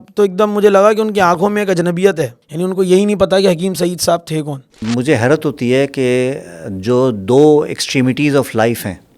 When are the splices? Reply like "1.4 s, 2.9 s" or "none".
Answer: 2.4 s, 4.8 s